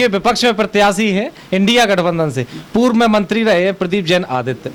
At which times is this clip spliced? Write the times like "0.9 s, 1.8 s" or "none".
none